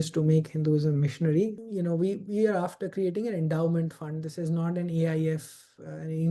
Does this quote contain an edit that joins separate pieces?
yes; 1 cut; at 1.6 s

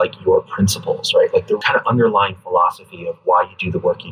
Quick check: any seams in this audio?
yes; 1 cut; at 1.6 s

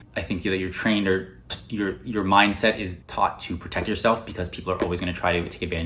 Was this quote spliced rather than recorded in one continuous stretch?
no; 0 cuts

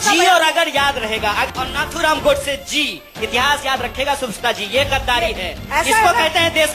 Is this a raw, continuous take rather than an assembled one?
no; 1 cut; at 1.5 s

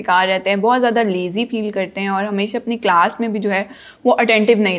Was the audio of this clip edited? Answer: no; 0 cuts

